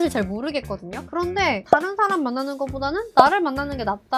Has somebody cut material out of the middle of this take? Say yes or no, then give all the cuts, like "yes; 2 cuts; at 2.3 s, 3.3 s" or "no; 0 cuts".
yes; 1 cut; at 1.0 s